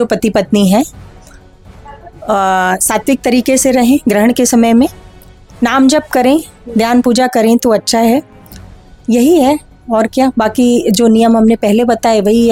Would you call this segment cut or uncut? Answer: uncut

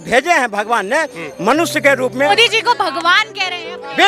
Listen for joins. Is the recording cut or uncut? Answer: cut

